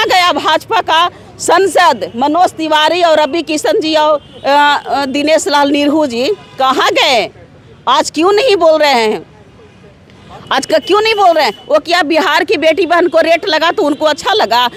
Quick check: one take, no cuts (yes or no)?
yes